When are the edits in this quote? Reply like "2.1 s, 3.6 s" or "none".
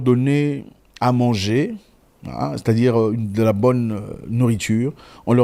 none